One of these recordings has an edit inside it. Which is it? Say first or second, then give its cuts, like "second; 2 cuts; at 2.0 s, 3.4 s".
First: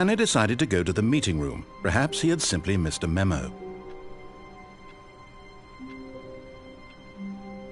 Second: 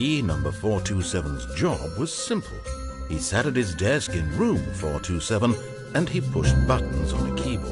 first; 1 cut; at 3.4 s